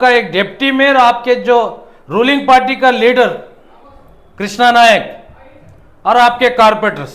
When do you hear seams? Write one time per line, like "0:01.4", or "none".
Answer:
none

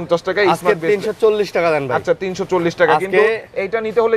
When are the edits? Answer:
none

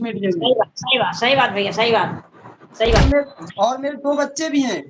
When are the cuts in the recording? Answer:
0:03.0

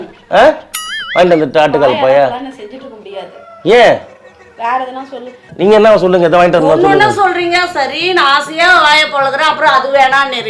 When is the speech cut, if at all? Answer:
0:05.5

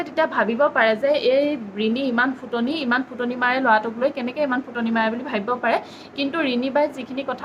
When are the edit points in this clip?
none

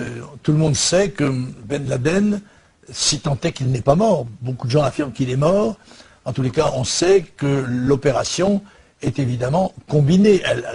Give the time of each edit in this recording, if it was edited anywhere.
none

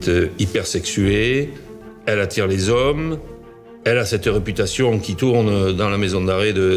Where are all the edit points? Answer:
none

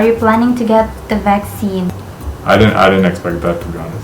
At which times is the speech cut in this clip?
0:02.0

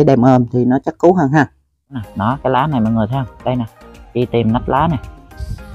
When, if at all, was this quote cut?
0:02.0

